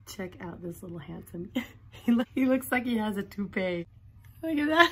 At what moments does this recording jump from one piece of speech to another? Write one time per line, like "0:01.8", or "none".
0:02.3
0:04.0